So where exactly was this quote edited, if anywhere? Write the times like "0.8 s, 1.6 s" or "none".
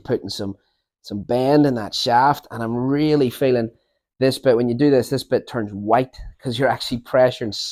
none